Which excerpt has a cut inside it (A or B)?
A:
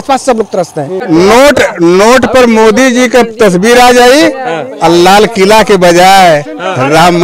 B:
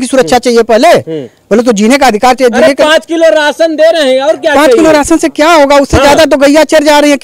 A